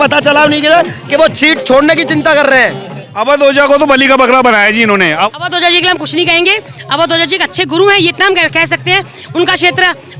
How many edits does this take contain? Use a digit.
2